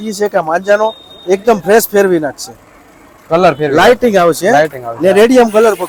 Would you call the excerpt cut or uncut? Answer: uncut